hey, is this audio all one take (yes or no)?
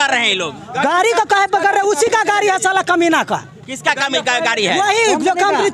yes